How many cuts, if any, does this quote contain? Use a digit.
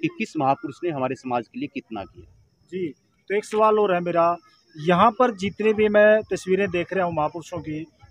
0